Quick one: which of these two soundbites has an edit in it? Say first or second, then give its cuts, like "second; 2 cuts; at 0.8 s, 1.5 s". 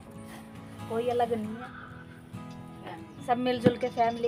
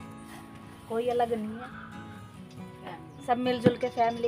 second; 2 cuts; at 1.7 s, 2.8 s